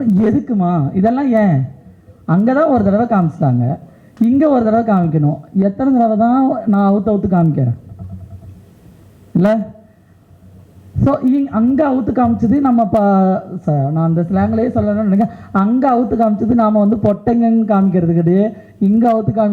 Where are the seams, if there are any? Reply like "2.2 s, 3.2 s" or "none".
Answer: none